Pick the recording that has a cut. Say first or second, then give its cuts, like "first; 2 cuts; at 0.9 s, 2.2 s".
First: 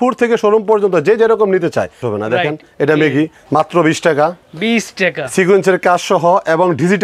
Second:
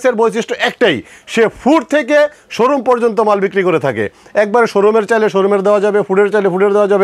first; 2 cuts; at 2.0 s, 3.4 s